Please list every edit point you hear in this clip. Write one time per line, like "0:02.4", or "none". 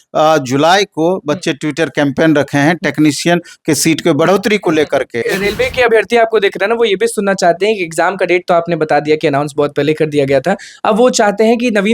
0:05.2

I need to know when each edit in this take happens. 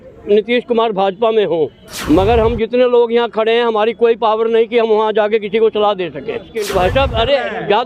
0:01.9
0:06.6

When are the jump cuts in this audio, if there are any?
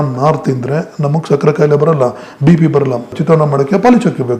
0:03.1

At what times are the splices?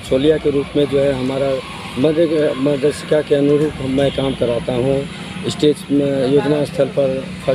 none

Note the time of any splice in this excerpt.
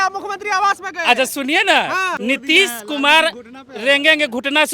0:02.1

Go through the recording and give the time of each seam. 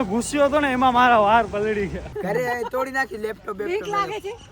0:02.5

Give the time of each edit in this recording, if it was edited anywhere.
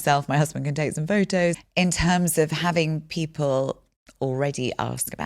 0:01.6

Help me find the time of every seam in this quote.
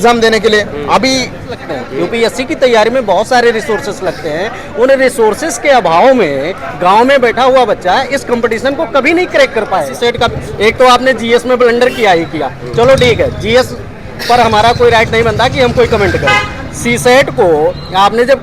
0:01.6
0:09.9

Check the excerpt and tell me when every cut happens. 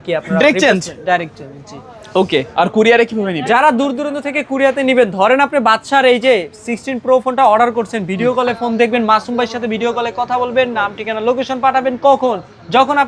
none

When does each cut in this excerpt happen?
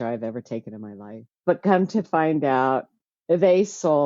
0:01.2

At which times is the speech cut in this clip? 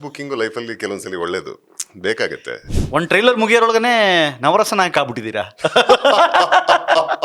0:02.7

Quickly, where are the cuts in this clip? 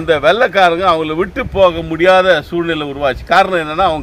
none

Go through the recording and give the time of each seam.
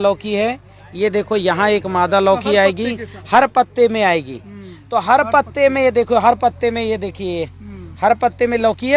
none

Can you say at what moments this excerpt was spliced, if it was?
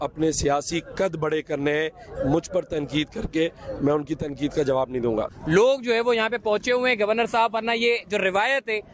0:05.3

